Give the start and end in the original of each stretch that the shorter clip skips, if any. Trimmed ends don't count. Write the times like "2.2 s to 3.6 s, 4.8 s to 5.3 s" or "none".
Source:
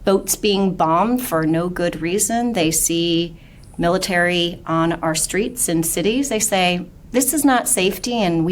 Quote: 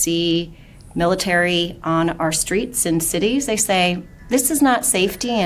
none